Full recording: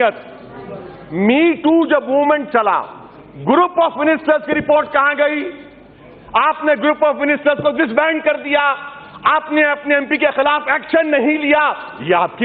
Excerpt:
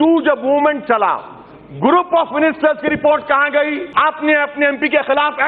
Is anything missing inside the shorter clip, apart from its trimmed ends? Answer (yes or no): yes